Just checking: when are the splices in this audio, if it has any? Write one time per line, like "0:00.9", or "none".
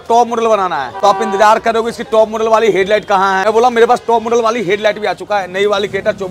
0:00.9
0:03.4